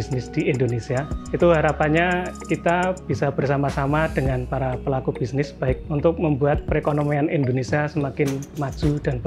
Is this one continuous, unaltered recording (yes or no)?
no